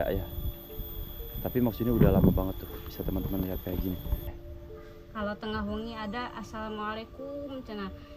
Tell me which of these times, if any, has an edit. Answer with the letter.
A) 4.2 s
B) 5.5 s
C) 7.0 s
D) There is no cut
A